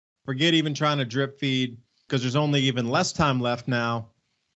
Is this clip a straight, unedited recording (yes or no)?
no